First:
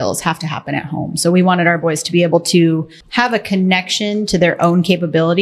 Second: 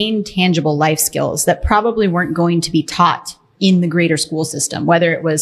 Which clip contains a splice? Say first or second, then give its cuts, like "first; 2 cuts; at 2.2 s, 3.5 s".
first; 1 cut; at 3.0 s